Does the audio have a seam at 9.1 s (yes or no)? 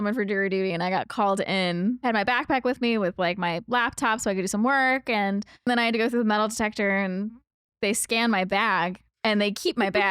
yes